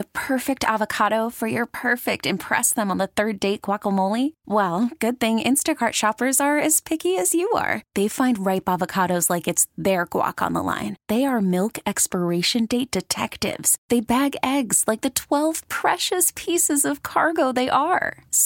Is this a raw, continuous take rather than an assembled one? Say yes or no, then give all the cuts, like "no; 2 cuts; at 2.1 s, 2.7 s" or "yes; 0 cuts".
yes; 0 cuts